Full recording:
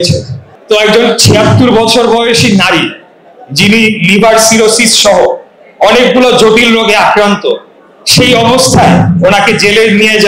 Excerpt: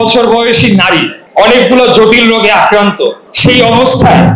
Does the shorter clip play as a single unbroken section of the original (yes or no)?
no